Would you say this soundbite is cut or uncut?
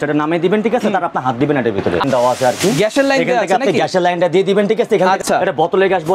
cut